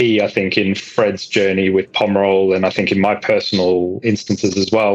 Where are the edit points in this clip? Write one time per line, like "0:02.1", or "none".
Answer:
0:04.0